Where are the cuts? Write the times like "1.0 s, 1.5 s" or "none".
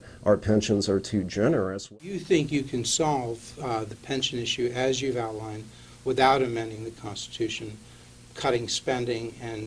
1.9 s